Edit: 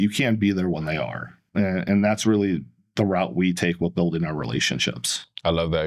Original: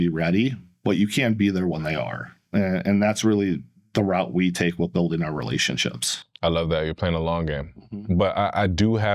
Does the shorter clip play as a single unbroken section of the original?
yes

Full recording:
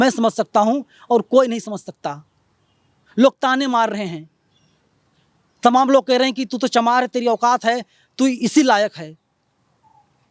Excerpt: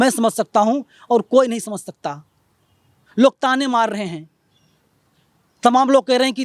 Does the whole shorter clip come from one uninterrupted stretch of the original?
yes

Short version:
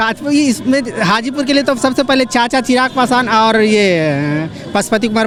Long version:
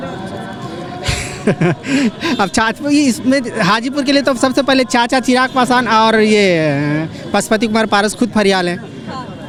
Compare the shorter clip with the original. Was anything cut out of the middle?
no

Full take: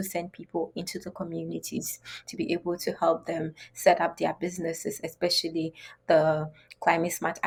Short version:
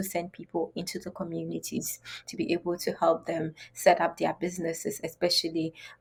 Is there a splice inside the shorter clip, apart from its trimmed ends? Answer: no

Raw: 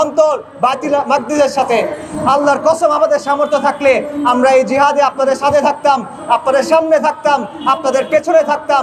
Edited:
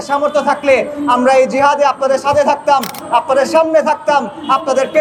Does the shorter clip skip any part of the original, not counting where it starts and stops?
no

